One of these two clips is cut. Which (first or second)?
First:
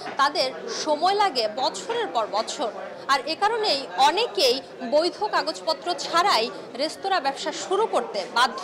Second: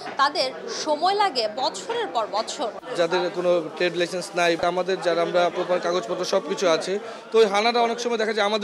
second